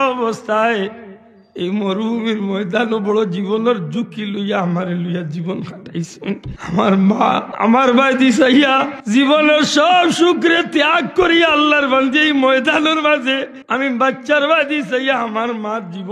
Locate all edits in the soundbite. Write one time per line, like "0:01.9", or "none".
0:06.5
0:07.5
0:08.9
0:13.6